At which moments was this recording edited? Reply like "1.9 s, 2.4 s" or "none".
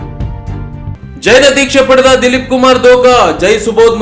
0.9 s